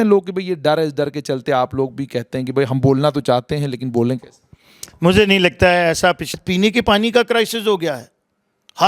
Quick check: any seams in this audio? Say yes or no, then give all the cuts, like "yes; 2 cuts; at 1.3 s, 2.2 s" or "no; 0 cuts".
yes; 1 cut; at 6.3 s